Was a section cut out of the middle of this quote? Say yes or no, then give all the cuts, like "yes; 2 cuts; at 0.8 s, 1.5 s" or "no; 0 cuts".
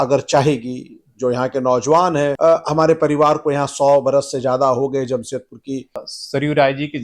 yes; 1 cut; at 6.1 s